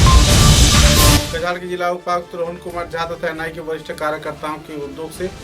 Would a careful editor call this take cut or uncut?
cut